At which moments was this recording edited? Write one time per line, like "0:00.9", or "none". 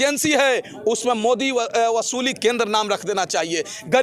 none